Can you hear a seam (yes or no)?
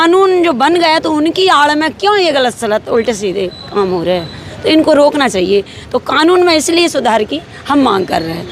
no